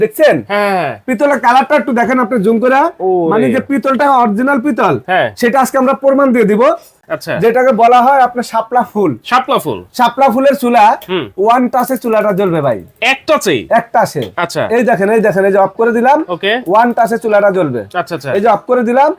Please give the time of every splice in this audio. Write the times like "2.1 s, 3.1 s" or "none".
7.1 s